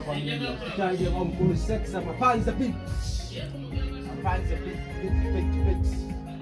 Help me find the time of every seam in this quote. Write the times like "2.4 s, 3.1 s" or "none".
none